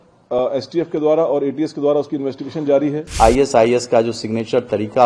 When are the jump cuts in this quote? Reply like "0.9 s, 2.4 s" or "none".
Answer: 3.2 s